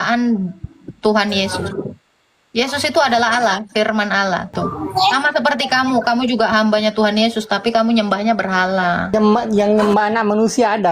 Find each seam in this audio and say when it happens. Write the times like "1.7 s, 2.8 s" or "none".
4.5 s, 9.1 s